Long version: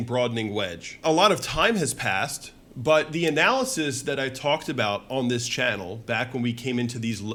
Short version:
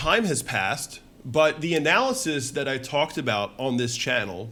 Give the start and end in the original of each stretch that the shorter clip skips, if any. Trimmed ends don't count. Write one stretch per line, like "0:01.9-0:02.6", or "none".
none